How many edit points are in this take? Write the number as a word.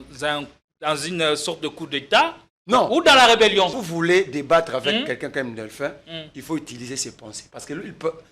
one